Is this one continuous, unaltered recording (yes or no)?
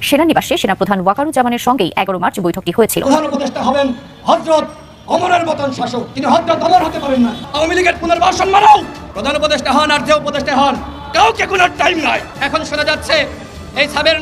no